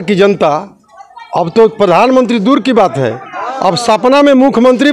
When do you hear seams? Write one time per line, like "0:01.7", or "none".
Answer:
none